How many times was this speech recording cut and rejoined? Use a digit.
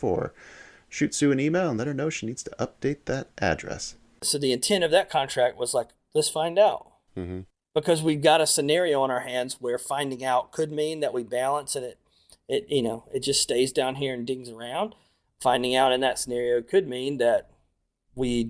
1